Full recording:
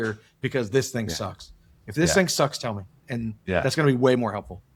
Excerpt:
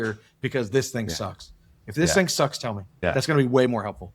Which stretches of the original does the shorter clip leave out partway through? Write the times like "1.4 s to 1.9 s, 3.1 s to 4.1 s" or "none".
2.9 s to 3.4 s